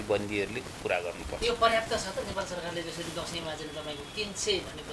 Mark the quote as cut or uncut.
uncut